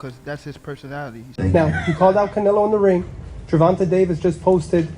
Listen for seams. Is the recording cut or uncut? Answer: cut